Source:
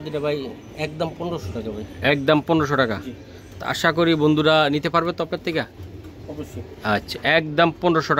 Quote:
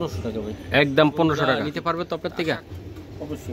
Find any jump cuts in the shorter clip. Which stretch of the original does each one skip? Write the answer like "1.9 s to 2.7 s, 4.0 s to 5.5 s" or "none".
3.2 s to 4.9 s